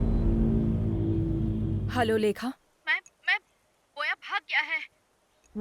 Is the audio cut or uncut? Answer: cut